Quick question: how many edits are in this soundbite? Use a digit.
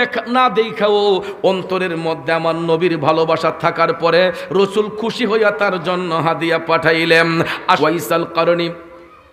1